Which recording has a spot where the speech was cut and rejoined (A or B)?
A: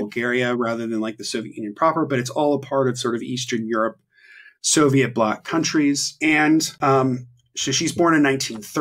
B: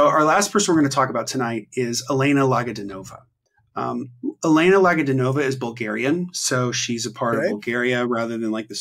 A